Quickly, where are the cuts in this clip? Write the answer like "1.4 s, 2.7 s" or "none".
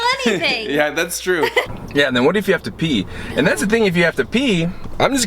1.7 s